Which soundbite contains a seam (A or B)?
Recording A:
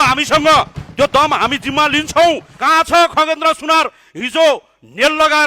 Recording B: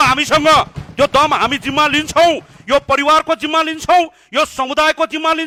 A